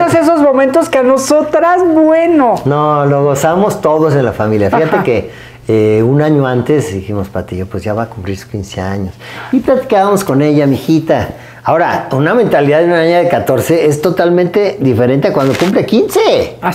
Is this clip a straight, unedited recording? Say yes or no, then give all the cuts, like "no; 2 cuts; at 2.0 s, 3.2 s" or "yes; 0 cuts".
yes; 0 cuts